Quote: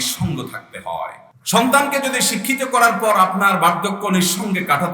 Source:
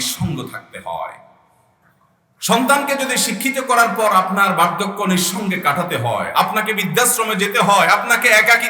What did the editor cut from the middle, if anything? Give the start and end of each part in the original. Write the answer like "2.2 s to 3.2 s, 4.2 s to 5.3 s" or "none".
1.3 s to 2.2 s